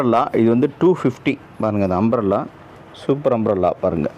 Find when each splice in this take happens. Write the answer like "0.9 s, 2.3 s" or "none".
none